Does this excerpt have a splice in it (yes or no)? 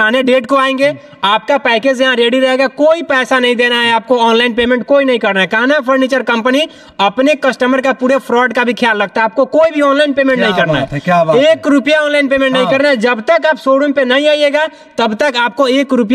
no